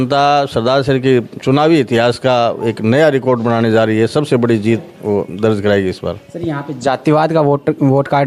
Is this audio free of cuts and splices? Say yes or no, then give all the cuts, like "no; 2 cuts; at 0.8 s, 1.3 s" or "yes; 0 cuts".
yes; 0 cuts